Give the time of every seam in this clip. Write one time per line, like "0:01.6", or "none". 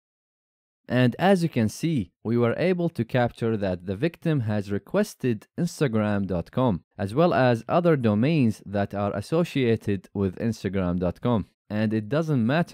none